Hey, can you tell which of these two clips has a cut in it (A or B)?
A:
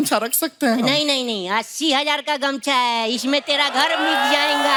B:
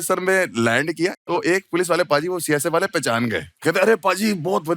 B